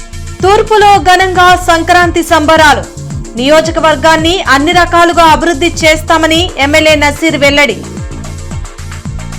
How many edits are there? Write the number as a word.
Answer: zero